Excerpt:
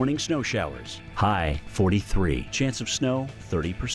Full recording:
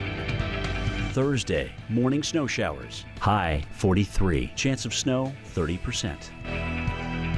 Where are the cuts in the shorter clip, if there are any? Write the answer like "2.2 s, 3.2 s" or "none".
none

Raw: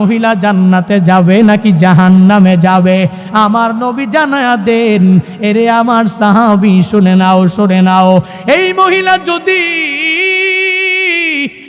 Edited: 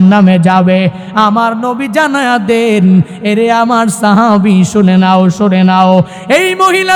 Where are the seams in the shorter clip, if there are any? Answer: none

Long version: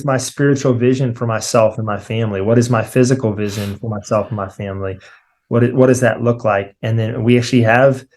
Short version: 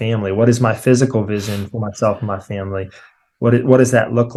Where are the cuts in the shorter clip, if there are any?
none

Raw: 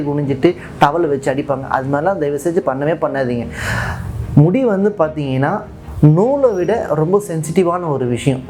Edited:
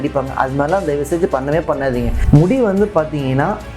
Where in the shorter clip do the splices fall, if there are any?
2.2 s

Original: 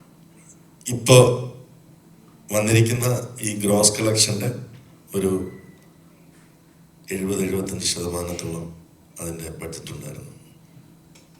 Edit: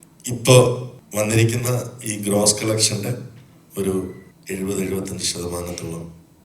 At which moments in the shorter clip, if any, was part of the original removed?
1.0 s, 4.3 s

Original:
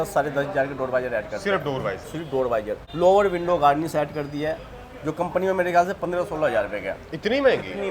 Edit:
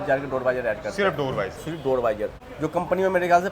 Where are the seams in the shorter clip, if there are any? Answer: 2.4 s

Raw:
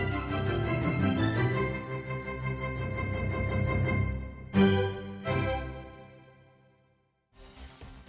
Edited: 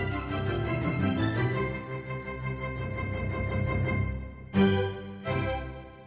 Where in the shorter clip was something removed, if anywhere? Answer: none

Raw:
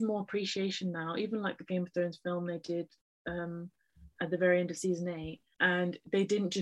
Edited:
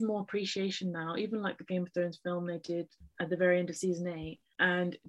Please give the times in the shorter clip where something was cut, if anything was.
3.0 s

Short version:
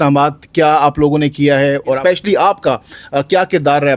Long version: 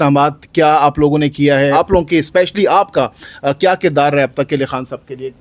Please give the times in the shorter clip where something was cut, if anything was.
1.8 s

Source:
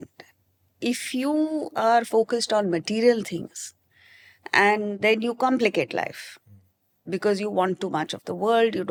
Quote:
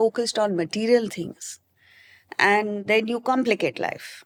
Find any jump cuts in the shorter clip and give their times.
none

